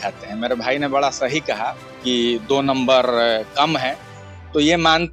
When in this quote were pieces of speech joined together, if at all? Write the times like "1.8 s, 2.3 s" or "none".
none